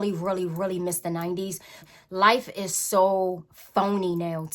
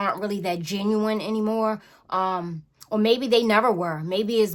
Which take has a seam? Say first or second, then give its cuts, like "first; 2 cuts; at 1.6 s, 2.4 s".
first; 1 cut; at 1.9 s